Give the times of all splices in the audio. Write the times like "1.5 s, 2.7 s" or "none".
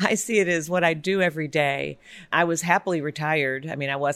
2.2 s